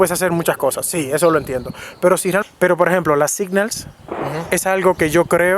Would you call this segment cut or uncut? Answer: cut